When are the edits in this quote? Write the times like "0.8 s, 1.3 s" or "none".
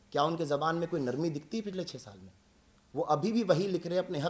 none